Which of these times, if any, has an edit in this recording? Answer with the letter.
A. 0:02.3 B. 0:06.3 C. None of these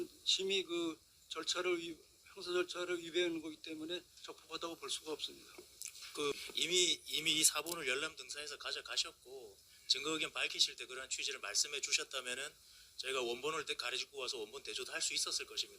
B